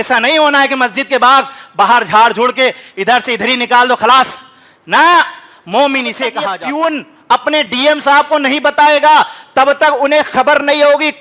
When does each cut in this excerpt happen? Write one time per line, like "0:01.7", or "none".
0:06.4